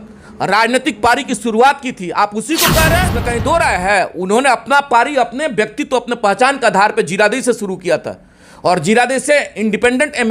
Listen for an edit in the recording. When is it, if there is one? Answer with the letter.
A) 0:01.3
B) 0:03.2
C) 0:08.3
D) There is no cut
B